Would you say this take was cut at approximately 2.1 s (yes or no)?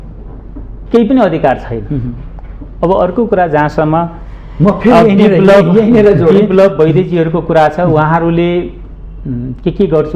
no